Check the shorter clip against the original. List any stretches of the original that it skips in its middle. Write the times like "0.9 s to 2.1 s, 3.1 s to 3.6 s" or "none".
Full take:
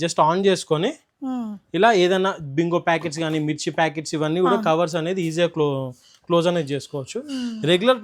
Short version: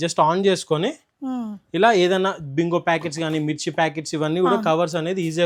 none